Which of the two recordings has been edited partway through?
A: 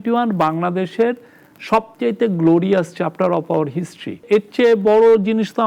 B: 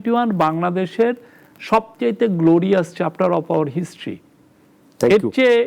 A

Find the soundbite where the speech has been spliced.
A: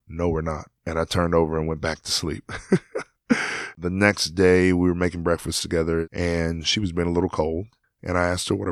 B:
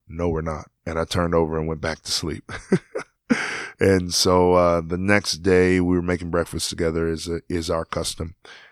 A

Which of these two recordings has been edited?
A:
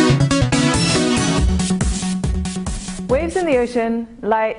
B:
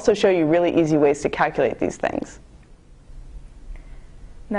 A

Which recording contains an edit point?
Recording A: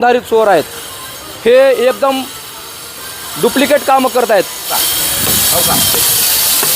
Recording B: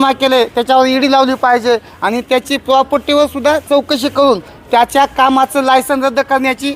A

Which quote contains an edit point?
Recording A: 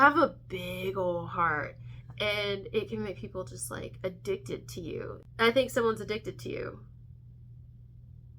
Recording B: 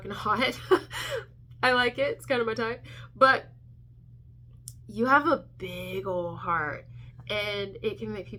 A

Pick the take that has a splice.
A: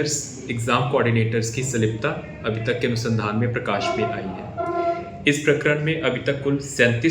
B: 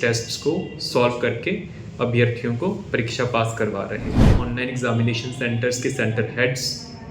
B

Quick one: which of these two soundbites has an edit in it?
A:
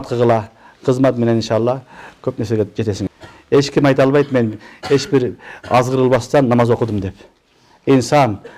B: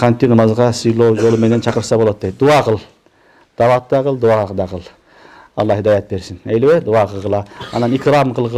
A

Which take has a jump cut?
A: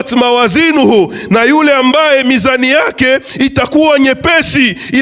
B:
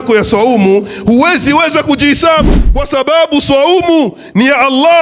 B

